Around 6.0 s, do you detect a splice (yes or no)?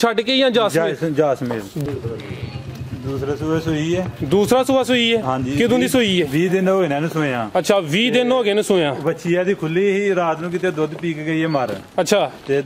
no